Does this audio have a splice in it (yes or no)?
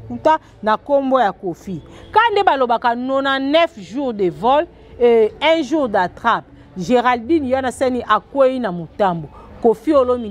no